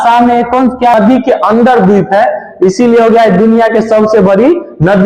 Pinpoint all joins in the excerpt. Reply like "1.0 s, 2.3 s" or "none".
0.9 s